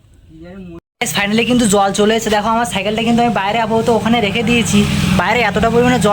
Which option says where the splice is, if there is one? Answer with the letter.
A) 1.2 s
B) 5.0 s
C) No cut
A